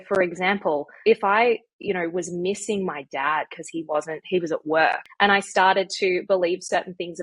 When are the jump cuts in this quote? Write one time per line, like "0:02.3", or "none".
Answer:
0:00.9
0:05.0